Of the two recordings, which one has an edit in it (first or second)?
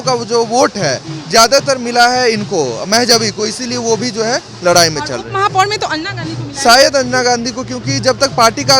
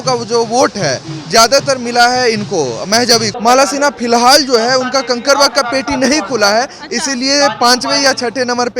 second